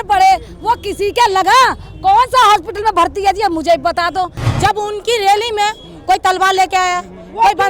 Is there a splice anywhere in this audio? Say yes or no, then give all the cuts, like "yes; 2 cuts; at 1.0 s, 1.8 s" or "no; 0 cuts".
yes; 1 cut; at 4.4 s